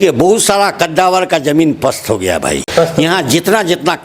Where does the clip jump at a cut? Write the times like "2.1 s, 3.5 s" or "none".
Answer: 2.6 s